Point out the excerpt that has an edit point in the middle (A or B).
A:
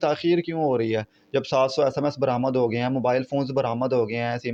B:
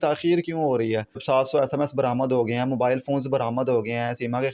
B